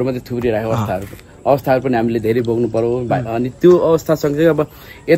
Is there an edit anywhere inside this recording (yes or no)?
no